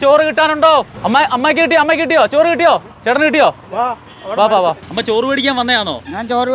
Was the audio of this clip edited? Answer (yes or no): yes